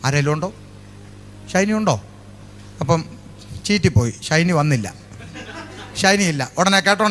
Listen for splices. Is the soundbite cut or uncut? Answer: uncut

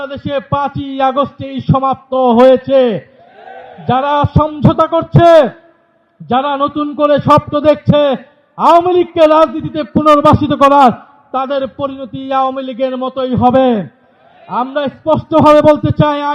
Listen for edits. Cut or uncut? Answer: uncut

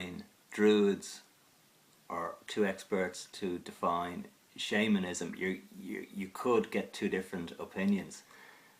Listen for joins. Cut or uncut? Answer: cut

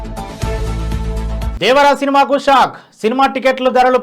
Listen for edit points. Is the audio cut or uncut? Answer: cut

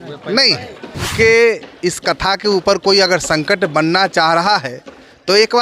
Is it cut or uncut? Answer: cut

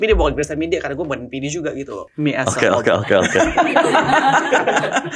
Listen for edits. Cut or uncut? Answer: cut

